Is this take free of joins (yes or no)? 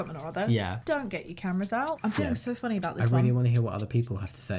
no